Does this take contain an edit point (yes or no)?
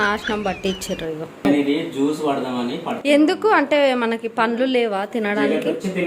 yes